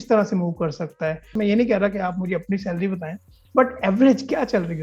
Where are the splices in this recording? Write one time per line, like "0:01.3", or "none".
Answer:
0:01.3